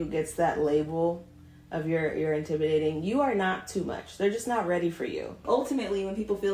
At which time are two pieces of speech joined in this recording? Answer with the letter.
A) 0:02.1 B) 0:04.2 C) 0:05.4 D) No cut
C